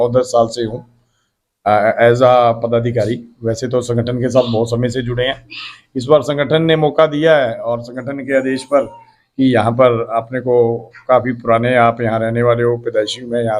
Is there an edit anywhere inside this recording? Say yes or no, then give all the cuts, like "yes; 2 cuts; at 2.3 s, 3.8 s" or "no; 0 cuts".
no; 0 cuts